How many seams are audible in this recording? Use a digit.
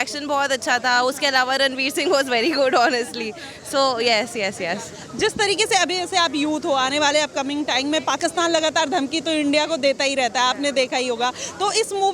0